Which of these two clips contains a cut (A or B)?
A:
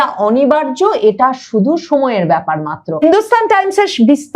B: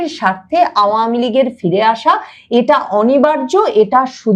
A